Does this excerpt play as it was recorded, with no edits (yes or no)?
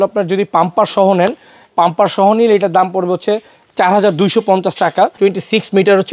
no